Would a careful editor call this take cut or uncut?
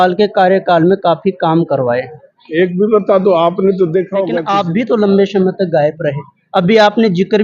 cut